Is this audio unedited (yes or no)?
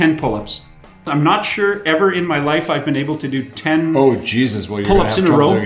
no